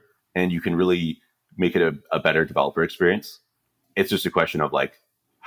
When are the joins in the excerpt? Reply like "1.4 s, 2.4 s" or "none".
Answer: 3.7 s